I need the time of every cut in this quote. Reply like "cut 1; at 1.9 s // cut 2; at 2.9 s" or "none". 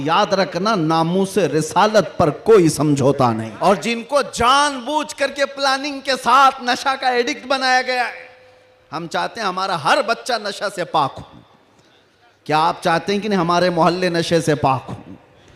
cut 1; at 3.5 s